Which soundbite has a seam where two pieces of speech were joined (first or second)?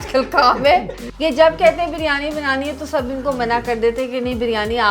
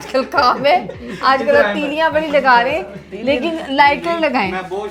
first